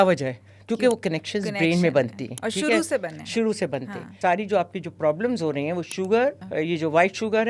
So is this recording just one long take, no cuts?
no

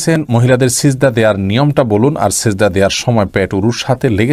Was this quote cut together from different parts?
no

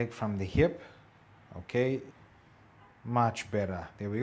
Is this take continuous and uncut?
no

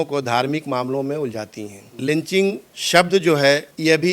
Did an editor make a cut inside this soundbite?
yes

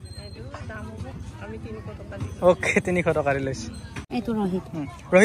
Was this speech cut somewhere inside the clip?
yes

